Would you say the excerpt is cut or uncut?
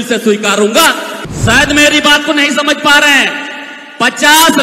cut